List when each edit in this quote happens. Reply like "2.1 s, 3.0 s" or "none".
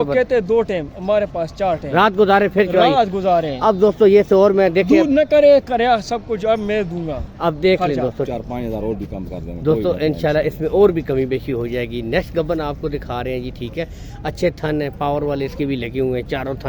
8.3 s